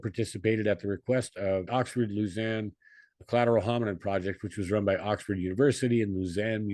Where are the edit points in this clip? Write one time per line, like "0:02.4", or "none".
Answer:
0:01.7